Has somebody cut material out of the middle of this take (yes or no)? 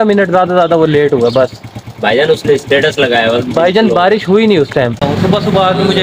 yes